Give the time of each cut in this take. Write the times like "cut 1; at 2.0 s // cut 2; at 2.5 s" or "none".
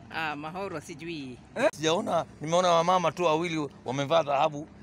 cut 1; at 1.7 s